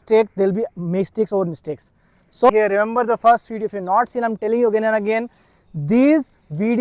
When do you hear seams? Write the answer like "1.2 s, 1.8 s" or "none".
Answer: 2.5 s

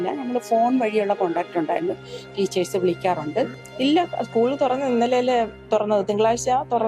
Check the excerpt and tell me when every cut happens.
3.6 s

